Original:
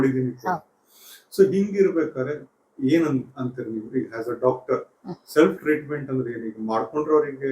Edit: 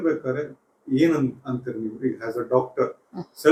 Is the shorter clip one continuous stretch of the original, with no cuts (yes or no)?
yes